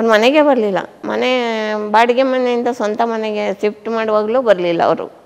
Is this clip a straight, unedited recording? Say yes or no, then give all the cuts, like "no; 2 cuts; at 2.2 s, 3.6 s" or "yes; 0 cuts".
no; 1 cut; at 1.0 s